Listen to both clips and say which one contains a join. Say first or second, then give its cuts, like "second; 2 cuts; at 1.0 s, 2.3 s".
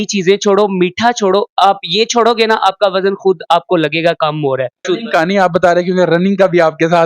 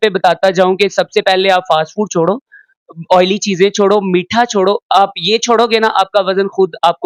first; 1 cut; at 4.8 s